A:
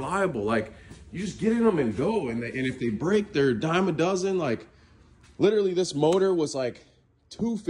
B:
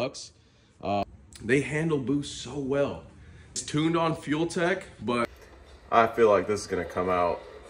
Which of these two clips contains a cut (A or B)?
B